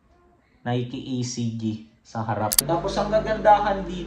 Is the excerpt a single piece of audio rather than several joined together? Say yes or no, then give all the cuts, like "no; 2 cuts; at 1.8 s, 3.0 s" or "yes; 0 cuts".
no; 1 cut; at 2.6 s